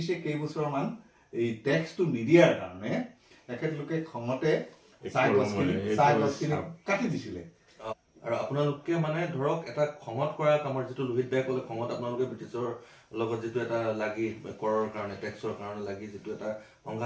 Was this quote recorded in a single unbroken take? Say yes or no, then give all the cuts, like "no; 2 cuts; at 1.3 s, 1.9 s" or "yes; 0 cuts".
no; 1 cut; at 7.9 s